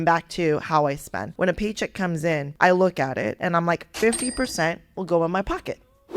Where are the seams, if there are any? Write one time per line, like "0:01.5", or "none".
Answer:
0:01.2
0:02.5
0:03.4